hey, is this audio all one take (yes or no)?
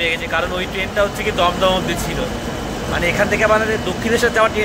yes